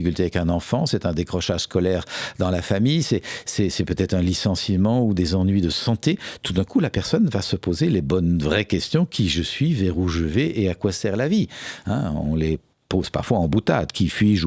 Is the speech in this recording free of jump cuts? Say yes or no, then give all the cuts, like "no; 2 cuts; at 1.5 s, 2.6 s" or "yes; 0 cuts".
yes; 0 cuts